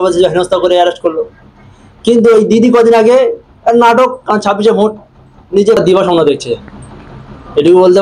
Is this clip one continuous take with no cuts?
no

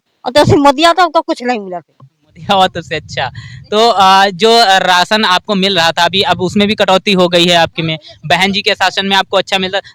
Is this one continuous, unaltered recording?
yes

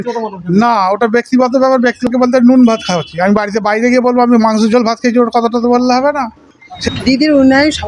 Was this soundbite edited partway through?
yes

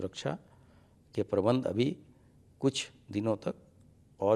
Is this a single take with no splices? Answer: yes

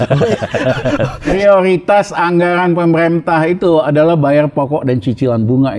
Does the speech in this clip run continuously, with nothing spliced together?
no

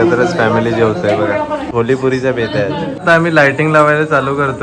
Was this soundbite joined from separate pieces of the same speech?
yes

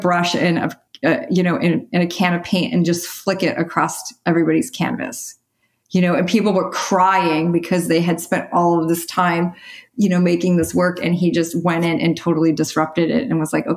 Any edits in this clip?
no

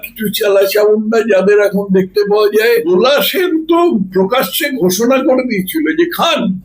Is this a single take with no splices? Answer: no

